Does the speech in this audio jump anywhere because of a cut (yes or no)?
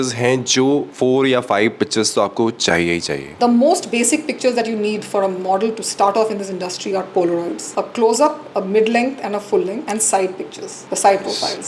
yes